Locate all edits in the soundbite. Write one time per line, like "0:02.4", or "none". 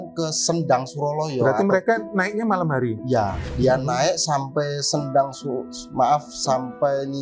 0:03.4

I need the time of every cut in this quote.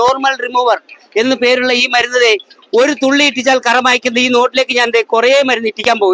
none

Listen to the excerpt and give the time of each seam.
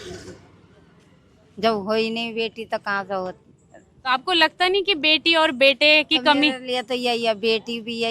none

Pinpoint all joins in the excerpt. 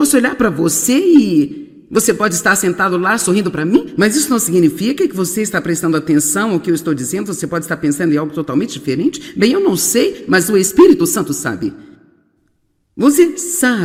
none

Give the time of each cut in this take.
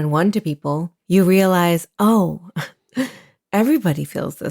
0:00.9

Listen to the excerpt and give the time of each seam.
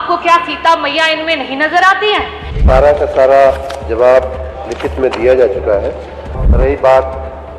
0:02.5
0:06.4

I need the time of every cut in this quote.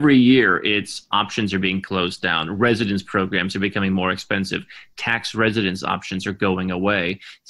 none

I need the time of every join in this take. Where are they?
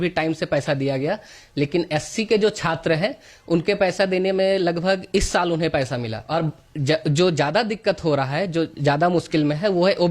0:06.2

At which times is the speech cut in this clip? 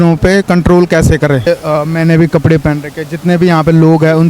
0:01.4

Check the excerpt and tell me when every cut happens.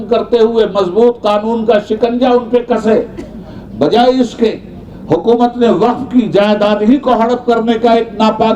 none

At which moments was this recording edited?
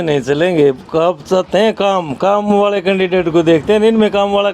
none

